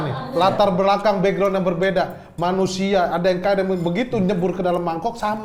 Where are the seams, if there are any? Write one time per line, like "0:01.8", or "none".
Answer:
none